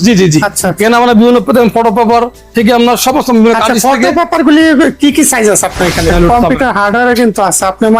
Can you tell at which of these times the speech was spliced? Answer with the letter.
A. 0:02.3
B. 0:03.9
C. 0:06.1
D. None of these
C